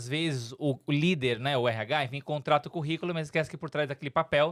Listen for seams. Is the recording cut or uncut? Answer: uncut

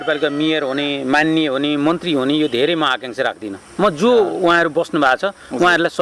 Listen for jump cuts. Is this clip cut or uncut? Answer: uncut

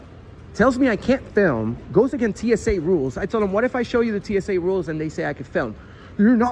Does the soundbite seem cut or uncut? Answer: uncut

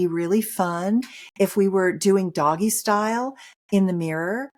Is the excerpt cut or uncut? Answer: uncut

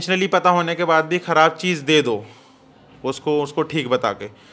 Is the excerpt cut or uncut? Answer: uncut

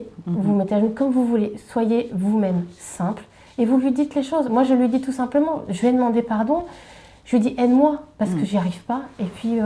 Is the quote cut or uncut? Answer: uncut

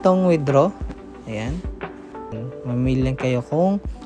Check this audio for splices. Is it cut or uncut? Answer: cut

